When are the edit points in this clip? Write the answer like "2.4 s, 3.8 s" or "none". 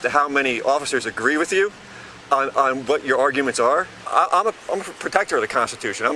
4.0 s